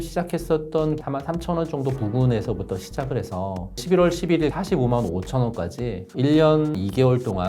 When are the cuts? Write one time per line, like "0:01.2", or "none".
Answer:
0:01.0
0:03.8